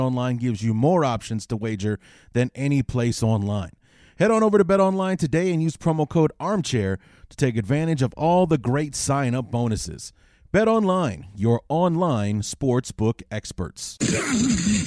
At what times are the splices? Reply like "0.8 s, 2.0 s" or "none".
13.8 s